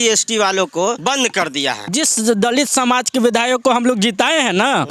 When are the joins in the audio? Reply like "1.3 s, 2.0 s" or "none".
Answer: 1.0 s, 1.9 s